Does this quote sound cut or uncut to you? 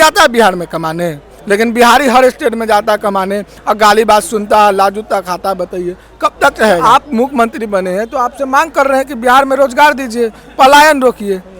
cut